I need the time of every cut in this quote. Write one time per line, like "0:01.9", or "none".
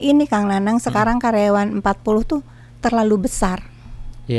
none